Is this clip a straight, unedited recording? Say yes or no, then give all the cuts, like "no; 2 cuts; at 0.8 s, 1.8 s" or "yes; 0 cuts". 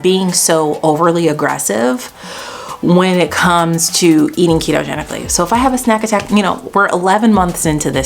yes; 0 cuts